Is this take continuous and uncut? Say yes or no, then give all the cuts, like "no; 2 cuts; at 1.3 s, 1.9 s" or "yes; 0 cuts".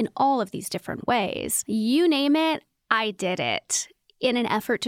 no; 1 cut; at 1.5 s